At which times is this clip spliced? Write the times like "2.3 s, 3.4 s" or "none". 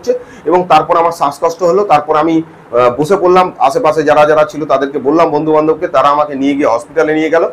none